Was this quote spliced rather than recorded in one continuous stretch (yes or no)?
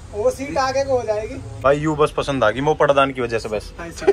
yes